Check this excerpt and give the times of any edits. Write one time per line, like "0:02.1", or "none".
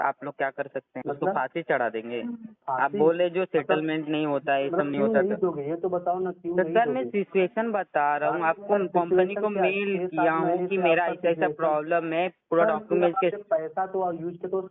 0:00.9
0:02.5